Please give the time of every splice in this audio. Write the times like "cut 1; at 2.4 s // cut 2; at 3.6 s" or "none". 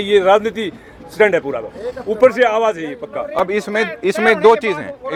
none